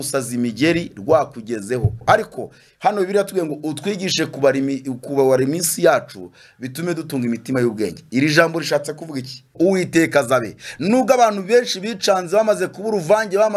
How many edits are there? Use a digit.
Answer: 2